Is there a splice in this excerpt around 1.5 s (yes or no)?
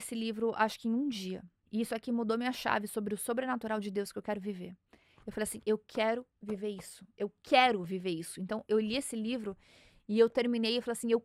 yes